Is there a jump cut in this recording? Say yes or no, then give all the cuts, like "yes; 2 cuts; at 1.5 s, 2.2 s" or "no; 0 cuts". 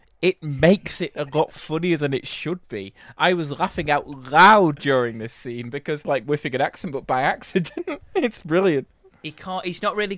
yes; 1 cut; at 6.0 s